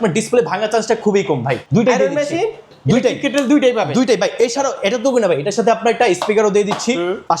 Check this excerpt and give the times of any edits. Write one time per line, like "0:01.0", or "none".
0:01.6
0:02.7